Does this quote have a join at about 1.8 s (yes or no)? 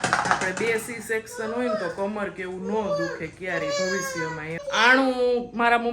no